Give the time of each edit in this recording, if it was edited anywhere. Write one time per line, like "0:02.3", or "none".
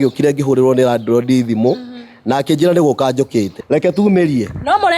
0:03.6